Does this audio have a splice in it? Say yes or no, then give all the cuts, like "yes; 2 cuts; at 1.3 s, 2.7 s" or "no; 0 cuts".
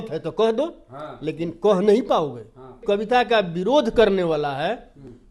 yes; 1 cut; at 2.8 s